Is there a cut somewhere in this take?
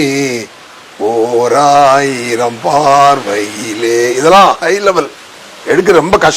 no; 0 cuts

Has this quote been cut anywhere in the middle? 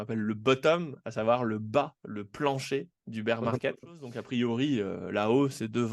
yes; 1 cut; at 4.1 s

